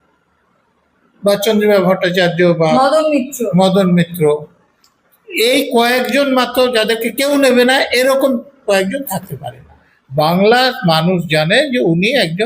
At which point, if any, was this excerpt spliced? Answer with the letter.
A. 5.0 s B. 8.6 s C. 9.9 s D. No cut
C